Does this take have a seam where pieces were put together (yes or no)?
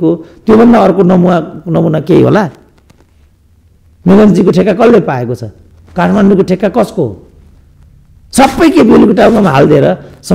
no